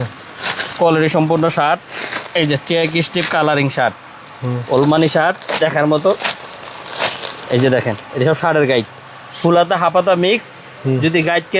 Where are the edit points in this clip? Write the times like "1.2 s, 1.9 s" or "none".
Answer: none